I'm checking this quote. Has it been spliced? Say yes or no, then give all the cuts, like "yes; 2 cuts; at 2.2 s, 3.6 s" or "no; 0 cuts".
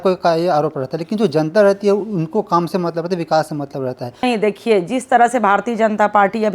yes; 1 cut; at 4.2 s